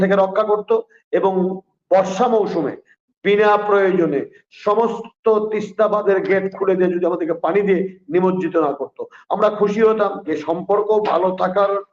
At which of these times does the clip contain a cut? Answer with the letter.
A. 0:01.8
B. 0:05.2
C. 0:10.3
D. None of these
C